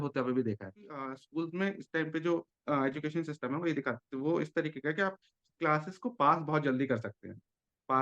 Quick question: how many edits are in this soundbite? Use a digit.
1